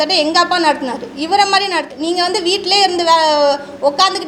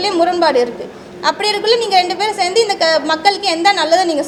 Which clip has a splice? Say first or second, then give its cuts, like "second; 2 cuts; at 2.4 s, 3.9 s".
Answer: first; 1 cut; at 1.9 s